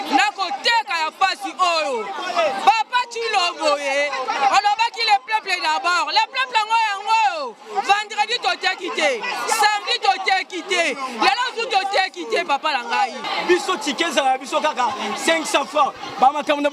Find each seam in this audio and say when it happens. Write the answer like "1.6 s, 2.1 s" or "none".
13.2 s